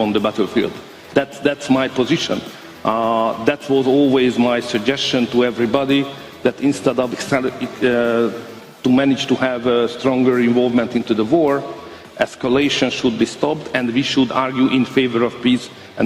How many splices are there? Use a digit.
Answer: 1